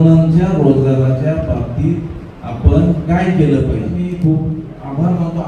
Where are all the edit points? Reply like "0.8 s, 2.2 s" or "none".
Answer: 4.0 s